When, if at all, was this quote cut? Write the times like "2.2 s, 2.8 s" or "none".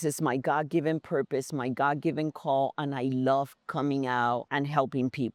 none